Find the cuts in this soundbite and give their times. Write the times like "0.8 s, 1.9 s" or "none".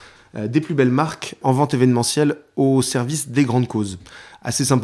1.4 s